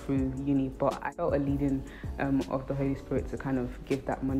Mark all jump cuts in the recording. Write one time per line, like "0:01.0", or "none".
0:01.1